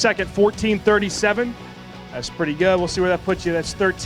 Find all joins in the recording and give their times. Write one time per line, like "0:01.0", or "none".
0:01.7